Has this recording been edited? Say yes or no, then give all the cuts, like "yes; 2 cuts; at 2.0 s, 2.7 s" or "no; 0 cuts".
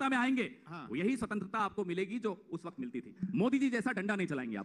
no; 0 cuts